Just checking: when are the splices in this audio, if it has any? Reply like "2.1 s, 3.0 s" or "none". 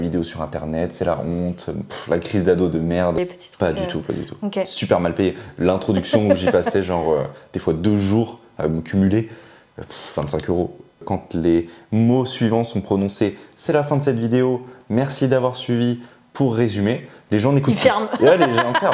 3.2 s, 11.0 s